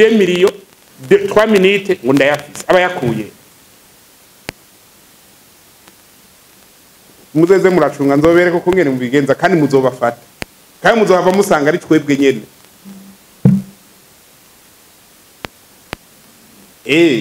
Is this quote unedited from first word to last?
yes; 0 cuts

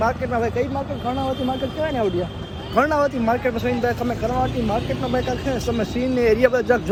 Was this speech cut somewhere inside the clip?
no; 0 cuts

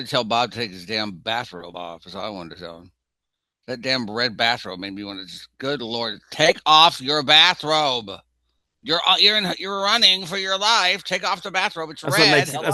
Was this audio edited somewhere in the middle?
no; 0 cuts

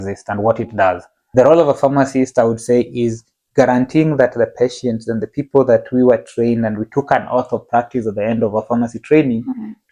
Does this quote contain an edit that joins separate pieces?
yes; 1 cut; at 1.1 s

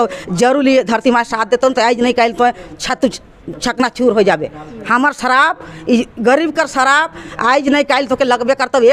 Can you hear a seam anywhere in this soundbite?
no; 0 cuts

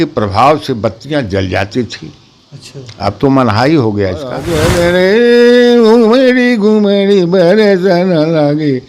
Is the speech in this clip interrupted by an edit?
yes; 1 cut; at 4.5 s

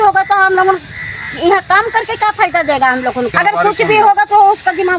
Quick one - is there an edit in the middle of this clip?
yes; 1 cut; at 3.3 s

